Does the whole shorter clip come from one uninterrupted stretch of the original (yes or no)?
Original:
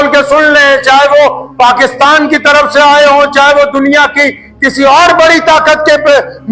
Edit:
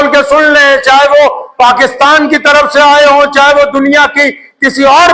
yes